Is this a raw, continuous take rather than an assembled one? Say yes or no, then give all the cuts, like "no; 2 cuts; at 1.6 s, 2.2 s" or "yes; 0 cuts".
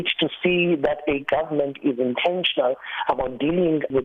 yes; 0 cuts